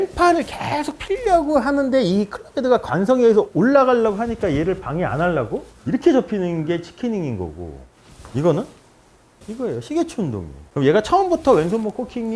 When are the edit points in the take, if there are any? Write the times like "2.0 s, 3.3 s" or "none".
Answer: 9.5 s, 10.6 s